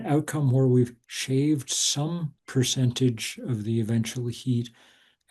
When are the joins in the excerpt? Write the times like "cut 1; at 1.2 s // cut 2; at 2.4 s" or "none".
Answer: cut 1; at 2.4 s